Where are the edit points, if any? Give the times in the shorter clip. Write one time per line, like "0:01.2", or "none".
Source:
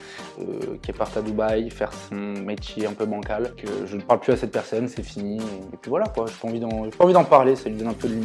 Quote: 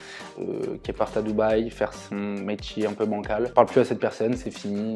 0:03.5